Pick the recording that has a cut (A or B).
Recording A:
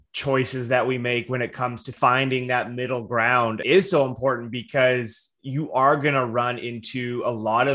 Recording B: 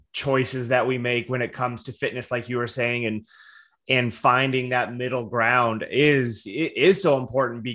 A